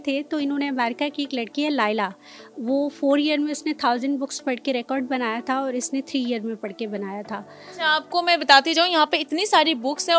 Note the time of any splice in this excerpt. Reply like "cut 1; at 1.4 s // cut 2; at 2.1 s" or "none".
none